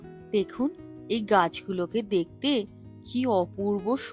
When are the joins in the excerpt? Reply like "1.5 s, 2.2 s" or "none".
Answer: none